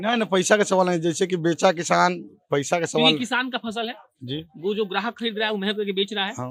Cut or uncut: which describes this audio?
uncut